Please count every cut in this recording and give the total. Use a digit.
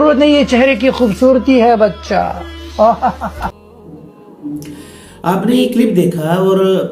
0